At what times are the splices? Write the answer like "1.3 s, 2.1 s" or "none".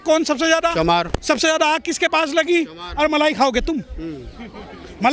none